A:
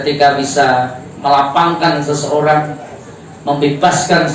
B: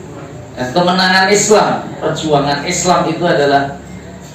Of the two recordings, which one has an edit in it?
B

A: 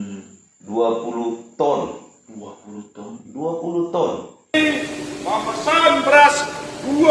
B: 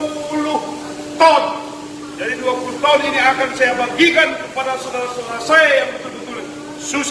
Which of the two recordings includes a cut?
A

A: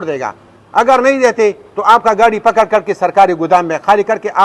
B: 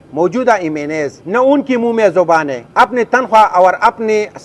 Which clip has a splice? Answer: B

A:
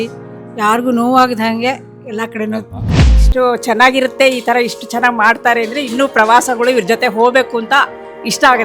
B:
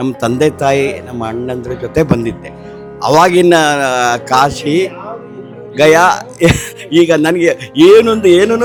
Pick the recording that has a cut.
A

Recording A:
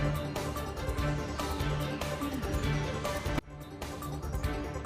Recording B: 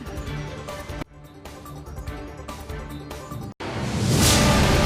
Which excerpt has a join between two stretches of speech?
B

